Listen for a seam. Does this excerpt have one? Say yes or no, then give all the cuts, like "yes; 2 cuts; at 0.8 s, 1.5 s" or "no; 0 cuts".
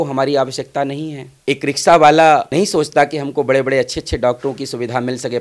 no; 0 cuts